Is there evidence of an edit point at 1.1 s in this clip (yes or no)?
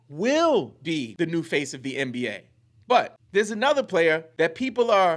yes